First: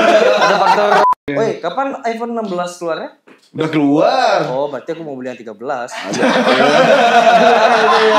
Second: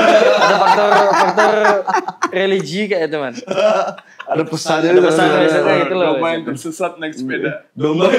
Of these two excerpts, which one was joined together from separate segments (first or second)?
first